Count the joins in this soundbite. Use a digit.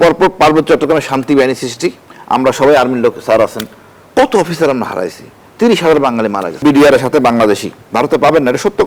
3